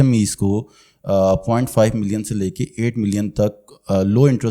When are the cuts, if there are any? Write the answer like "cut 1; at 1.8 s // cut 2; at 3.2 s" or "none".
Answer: none